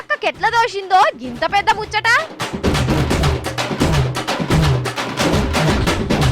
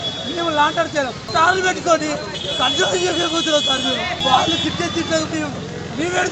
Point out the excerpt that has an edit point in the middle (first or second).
first